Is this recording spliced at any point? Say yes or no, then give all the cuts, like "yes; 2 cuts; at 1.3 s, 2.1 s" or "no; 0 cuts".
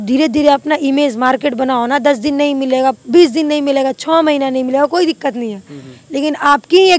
no; 0 cuts